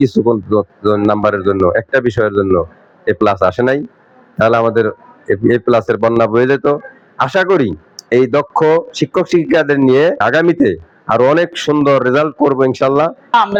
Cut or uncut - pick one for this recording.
uncut